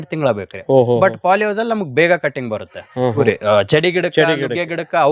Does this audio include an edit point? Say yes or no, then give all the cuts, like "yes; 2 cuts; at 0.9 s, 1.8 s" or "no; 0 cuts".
yes; 1 cut; at 3.2 s